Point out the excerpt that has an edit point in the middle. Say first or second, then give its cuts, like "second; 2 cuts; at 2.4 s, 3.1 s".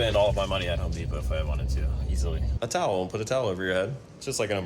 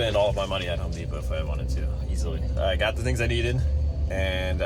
first; 1 cut; at 2.5 s